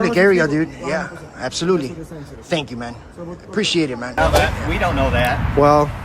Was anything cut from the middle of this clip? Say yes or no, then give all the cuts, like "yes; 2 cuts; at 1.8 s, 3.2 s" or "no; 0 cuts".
yes; 1 cut; at 4.2 s